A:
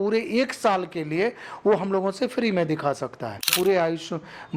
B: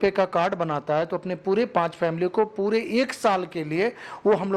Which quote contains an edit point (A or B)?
A